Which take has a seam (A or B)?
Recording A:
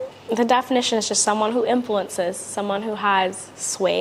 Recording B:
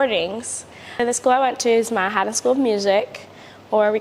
B